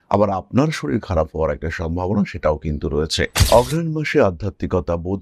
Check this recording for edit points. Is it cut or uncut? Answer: cut